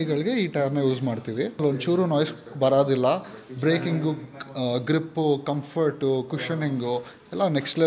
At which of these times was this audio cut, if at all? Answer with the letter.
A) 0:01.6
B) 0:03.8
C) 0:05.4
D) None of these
A